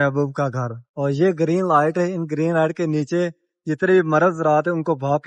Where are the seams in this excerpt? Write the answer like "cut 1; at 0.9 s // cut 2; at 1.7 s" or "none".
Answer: none